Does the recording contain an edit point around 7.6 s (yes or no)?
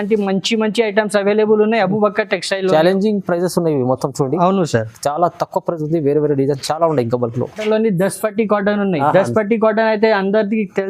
yes